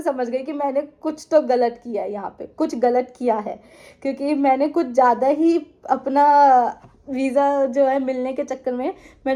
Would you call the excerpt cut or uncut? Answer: uncut